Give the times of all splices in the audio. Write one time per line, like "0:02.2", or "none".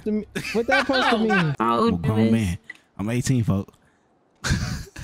0:01.5